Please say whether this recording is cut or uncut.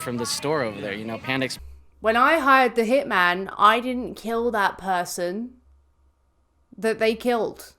cut